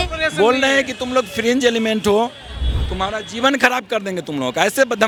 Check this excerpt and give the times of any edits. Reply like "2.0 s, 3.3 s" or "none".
none

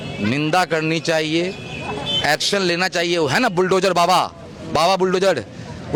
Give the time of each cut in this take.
none

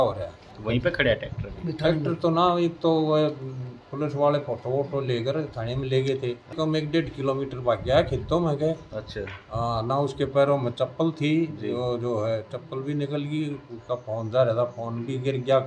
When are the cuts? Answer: 6.5 s

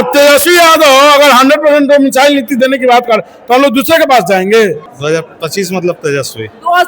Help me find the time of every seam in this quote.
4.9 s

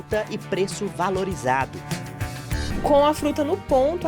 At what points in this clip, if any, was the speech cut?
2.6 s

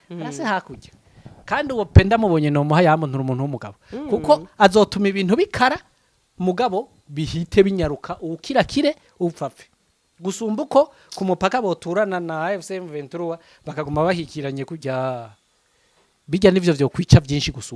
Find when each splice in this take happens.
none

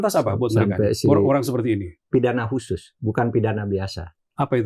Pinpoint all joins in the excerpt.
1.9 s

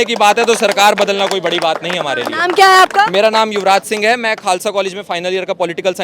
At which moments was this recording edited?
none

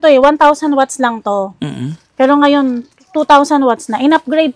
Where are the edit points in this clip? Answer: none

